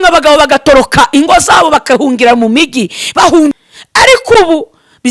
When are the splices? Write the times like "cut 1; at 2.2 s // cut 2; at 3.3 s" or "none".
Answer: cut 1; at 3.5 s